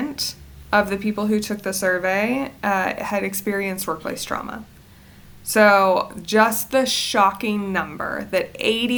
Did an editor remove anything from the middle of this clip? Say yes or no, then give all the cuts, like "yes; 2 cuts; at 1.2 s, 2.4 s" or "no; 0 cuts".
no; 0 cuts